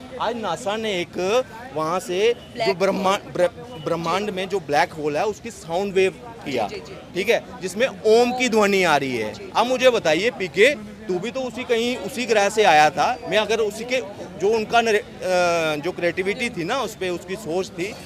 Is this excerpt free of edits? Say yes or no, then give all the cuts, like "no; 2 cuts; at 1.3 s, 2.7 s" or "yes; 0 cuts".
yes; 0 cuts